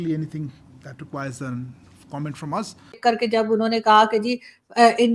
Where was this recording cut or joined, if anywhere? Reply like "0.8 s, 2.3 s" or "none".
2.9 s

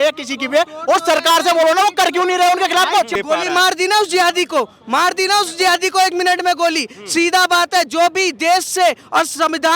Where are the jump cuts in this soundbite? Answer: 3.1 s

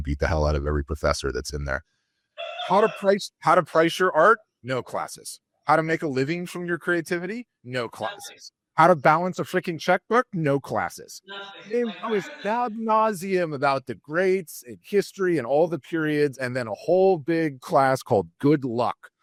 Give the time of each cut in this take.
none

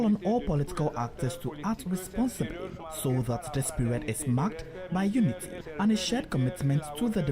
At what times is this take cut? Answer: 2.8 s, 5.6 s

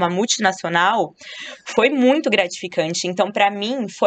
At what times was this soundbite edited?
none

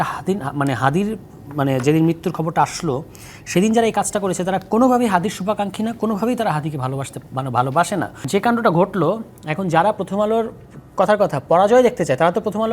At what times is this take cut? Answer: 8.2 s

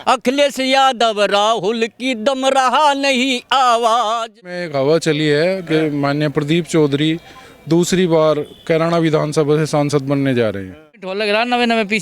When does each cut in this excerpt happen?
4.5 s, 11.1 s

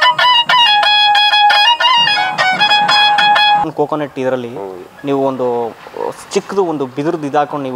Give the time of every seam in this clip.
3.6 s

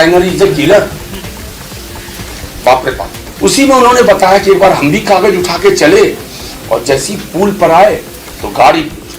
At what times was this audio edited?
3.2 s

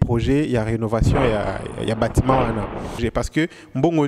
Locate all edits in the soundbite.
3.0 s

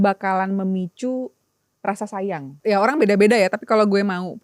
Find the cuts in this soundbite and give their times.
2.6 s

